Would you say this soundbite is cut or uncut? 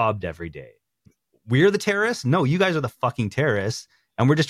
cut